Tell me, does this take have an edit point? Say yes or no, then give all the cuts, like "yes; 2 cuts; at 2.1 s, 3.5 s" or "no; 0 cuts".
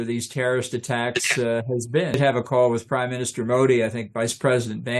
yes; 1 cut; at 2.2 s